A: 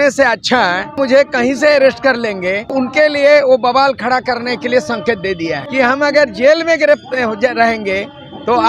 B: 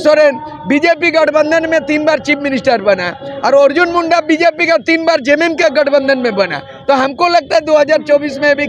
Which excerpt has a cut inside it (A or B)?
A